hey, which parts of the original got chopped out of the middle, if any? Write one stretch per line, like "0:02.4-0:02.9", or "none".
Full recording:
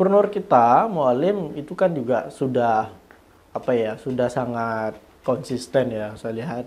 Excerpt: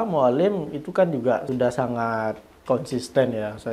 0:02.3-0:04.0